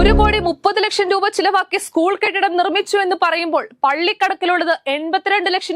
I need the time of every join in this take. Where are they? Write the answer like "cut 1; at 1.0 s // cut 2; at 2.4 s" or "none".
none